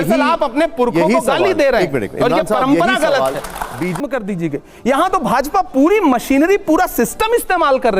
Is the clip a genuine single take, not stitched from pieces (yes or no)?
no